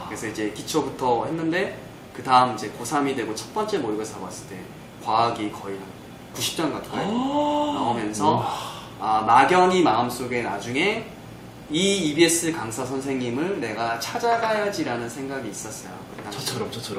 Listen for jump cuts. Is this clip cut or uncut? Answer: uncut